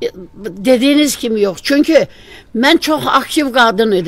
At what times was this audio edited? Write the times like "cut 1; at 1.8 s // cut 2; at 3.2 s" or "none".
none